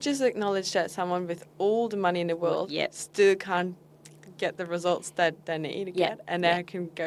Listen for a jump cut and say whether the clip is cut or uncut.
uncut